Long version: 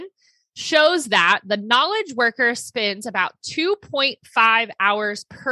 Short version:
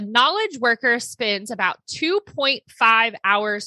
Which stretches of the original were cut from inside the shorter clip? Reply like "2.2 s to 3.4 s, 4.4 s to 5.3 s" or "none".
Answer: none